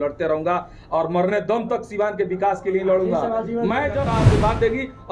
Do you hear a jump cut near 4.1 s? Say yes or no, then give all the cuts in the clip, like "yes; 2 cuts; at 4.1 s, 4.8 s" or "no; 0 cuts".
yes; 1 cut; at 4.1 s